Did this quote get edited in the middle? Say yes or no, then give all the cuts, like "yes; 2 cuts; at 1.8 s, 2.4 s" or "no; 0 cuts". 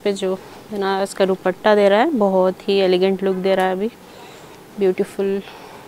no; 0 cuts